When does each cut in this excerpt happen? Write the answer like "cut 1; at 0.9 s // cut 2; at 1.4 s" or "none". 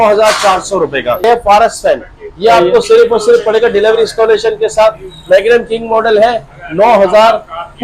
cut 1; at 1.2 s